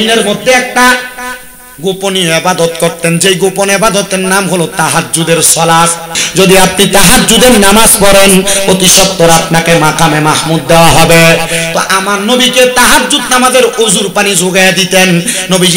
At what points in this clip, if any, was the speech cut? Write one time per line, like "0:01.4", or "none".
0:06.2